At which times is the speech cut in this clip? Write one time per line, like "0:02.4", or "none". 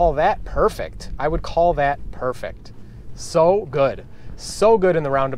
none